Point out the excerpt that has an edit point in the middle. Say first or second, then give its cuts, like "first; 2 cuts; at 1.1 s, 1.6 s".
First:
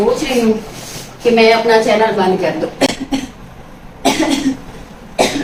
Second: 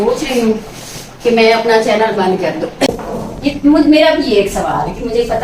second; 1 cut; at 2.9 s